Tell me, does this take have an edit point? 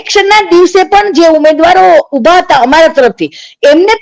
no; 0 cuts

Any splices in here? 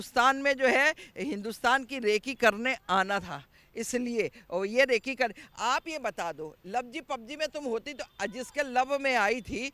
no; 0 cuts

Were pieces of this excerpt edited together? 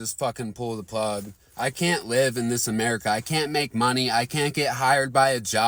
no; 0 cuts

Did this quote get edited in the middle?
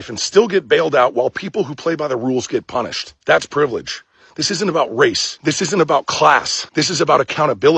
yes; 1 cut; at 6.6 s

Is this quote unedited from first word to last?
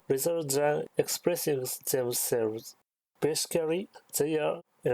no; 1 cut; at 3.0 s

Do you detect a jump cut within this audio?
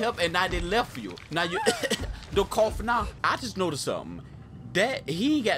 yes; 1 cut; at 3.1 s

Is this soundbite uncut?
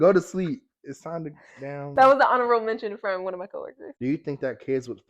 no; 1 cut; at 3.8 s

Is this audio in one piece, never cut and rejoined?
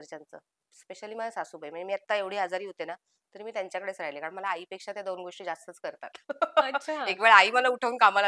yes; 0 cuts

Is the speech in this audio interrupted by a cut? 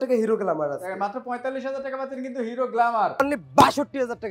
yes; 1 cut; at 3.2 s

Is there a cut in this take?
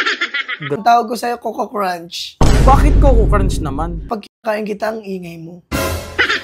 yes; 2 cuts; at 0.8 s, 4.0 s

